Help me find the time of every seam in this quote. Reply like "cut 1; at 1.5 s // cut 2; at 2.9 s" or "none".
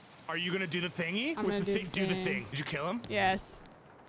cut 1; at 2.5 s